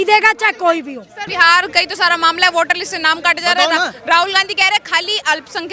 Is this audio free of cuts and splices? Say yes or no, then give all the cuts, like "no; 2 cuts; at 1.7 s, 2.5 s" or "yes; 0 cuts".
no; 1 cut; at 1.1 s